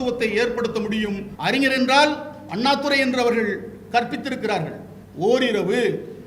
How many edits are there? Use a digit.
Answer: 1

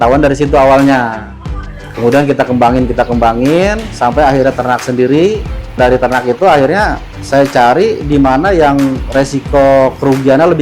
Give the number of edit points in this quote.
2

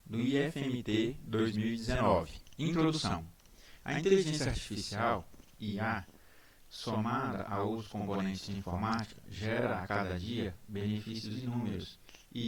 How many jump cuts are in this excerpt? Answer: 1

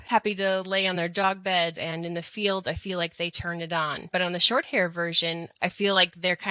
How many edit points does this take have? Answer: 3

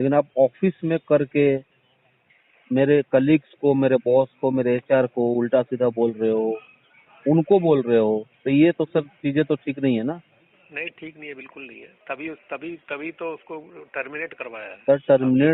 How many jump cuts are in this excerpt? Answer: 0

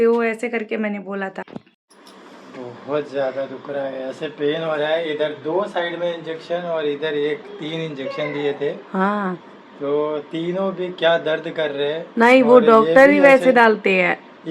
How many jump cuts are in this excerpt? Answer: 1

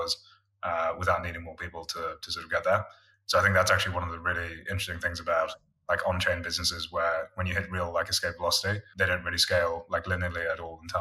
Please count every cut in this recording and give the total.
1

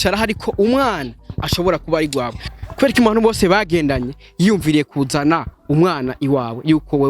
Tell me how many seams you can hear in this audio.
1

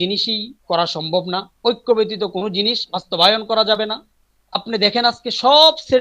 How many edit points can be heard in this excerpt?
1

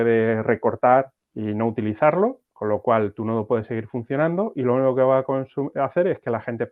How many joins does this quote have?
1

